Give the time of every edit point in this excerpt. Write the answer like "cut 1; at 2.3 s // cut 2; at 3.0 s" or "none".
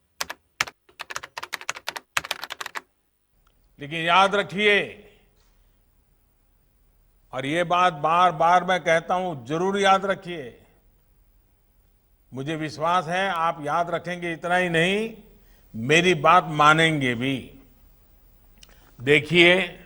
cut 1; at 3.0 s